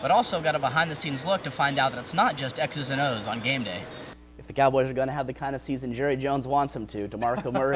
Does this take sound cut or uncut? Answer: cut